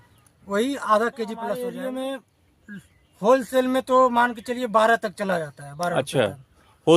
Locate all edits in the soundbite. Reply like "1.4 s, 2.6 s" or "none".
1.6 s